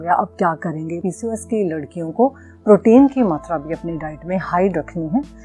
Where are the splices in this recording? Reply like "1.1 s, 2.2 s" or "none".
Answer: 1.0 s